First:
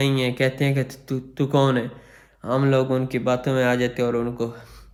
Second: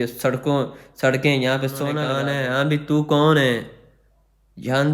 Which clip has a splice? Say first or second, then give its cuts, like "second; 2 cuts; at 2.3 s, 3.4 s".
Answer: second; 1 cut; at 2.0 s